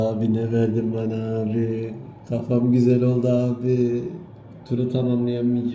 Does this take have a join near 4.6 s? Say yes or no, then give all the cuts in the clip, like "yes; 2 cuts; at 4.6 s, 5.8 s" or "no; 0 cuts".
no; 0 cuts